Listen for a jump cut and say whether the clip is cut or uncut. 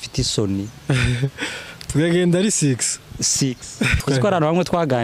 cut